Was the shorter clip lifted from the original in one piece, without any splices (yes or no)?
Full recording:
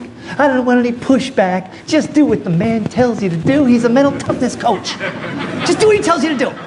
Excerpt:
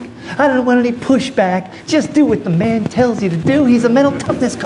yes